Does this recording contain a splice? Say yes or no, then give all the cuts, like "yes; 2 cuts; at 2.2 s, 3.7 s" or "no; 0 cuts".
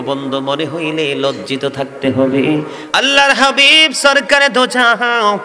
yes; 1 cut; at 2.8 s